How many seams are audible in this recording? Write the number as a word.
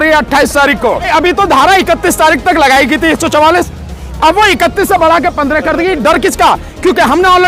one